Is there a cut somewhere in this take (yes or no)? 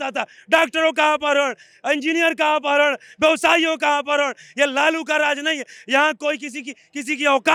no